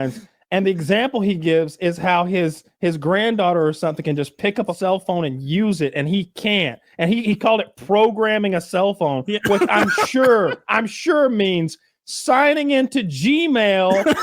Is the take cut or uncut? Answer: cut